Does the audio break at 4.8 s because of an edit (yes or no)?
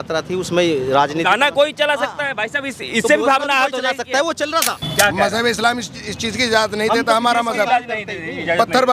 yes